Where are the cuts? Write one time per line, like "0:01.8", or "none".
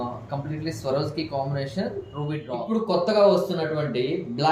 0:02.4